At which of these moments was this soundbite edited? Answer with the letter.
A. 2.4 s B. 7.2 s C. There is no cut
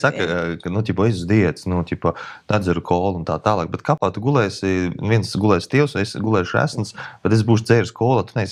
C